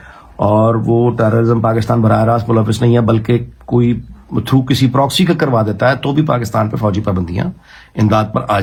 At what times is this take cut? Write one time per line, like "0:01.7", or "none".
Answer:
none

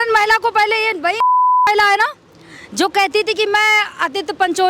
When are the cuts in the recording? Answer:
none

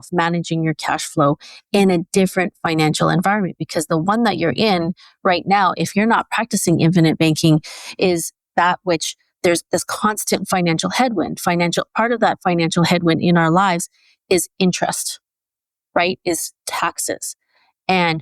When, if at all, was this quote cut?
none

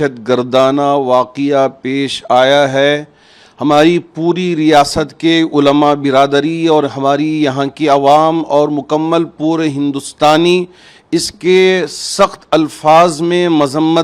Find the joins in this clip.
none

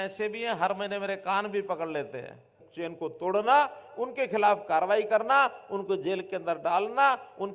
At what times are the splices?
0:02.6

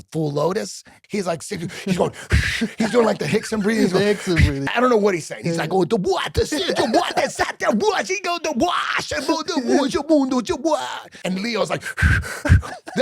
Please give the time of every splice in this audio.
0:00.9
0:04.6
0:11.2

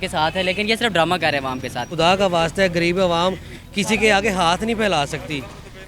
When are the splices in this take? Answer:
0:01.9

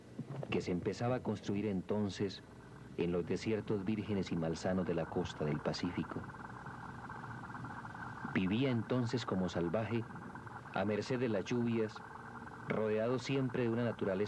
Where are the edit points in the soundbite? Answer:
none

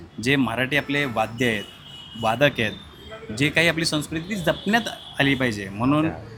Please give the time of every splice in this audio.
none

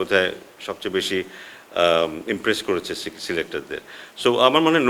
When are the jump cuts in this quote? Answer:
none

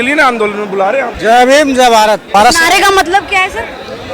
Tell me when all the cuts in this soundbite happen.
0:01.1
0:02.3

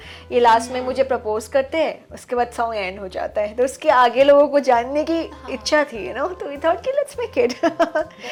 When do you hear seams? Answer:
none

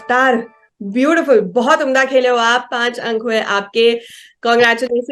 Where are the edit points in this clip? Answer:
none

